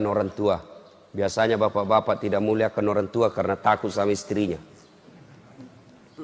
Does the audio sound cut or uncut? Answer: uncut